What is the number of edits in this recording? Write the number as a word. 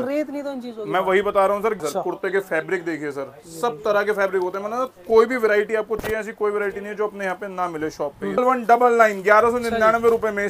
two